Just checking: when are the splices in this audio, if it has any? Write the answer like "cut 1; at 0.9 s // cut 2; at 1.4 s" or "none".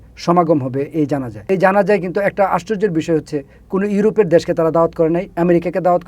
cut 1; at 1.3 s